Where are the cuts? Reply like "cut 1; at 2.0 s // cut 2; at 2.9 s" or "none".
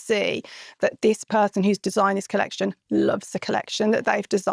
none